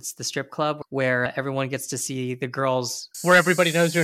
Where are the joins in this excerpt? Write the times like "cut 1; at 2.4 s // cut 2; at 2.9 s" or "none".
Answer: cut 1; at 3.1 s